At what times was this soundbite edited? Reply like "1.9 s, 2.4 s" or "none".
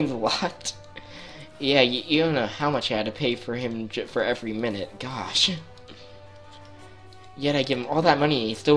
none